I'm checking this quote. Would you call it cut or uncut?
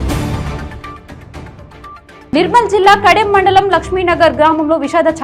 cut